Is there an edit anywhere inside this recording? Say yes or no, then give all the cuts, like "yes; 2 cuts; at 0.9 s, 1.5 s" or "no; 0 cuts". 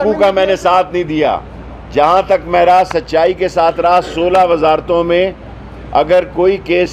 no; 0 cuts